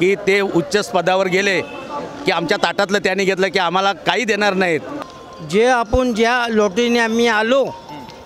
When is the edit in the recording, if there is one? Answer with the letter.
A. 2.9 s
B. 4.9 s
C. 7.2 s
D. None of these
B